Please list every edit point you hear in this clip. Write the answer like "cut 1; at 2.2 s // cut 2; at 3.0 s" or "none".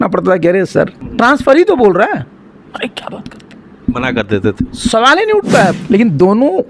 cut 1; at 1.0 s // cut 2; at 5.8 s